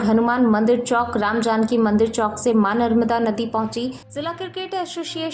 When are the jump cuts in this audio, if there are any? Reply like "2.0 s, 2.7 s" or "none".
4.1 s